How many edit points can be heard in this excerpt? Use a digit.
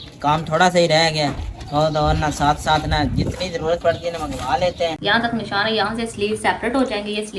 1